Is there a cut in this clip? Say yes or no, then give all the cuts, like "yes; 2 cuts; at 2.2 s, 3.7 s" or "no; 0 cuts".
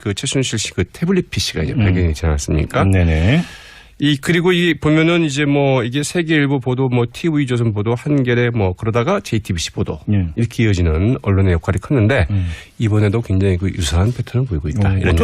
yes; 1 cut; at 1.1 s